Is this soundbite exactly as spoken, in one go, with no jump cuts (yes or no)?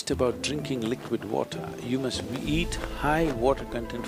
yes